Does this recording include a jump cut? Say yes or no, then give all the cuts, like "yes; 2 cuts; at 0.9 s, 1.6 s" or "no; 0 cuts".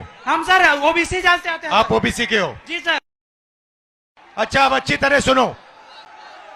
no; 0 cuts